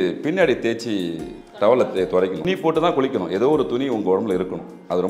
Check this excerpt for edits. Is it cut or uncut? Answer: cut